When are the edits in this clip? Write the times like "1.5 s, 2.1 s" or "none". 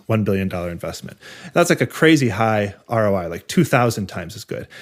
none